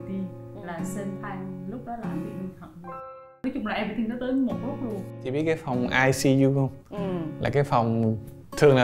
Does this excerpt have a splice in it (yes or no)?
yes